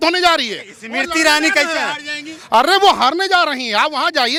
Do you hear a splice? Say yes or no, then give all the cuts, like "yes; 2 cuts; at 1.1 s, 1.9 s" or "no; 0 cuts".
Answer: no; 0 cuts